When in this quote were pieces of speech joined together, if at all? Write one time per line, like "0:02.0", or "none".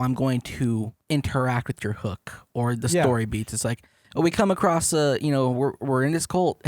0:01.0